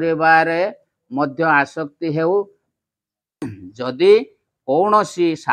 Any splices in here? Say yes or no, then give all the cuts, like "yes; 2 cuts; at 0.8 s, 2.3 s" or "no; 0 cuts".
yes; 1 cut; at 3.6 s